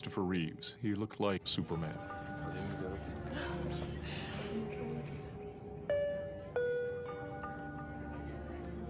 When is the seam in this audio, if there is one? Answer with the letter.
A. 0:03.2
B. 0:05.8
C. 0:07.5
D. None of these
D